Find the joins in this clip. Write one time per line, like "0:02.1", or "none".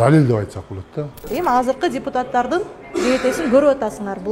0:01.2